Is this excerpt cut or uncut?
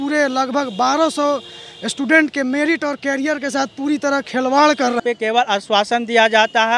cut